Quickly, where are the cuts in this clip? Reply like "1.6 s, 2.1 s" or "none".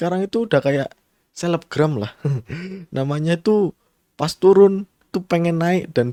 none